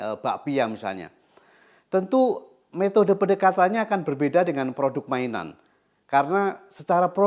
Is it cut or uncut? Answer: uncut